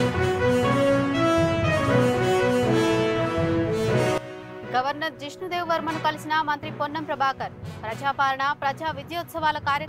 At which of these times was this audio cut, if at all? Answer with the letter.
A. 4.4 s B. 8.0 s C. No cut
A